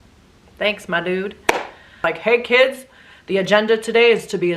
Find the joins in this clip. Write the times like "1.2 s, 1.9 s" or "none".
1.9 s